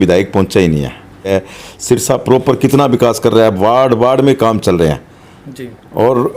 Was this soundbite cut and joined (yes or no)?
yes